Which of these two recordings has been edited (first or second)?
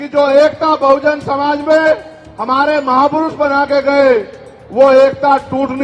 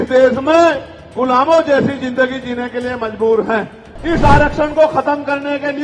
second